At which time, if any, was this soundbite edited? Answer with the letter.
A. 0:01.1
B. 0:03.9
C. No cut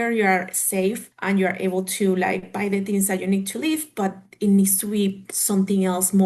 A